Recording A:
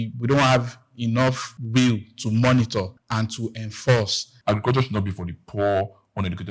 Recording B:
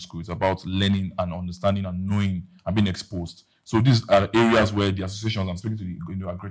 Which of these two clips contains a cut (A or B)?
A